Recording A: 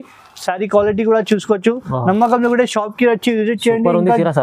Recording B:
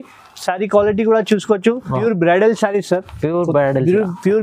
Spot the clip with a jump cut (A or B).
B